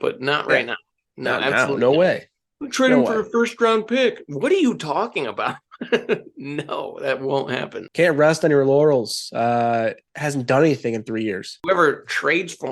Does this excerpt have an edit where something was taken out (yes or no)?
yes